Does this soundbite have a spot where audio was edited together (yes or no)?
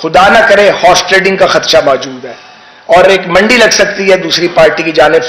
no